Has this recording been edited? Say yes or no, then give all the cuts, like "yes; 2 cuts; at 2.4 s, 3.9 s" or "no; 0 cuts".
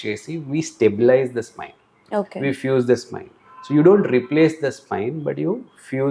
no; 0 cuts